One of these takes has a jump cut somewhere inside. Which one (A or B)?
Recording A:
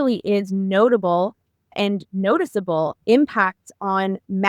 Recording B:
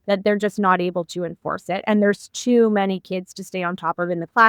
A